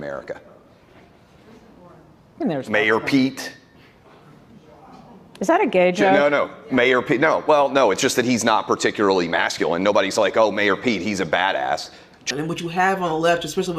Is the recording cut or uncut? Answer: cut